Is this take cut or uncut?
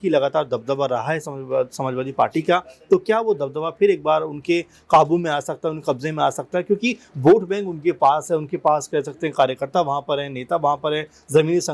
uncut